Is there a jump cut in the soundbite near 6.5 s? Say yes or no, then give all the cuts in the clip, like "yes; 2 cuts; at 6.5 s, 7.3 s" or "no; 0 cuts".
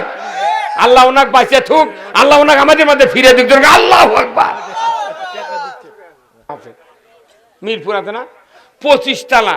yes; 1 cut; at 6.5 s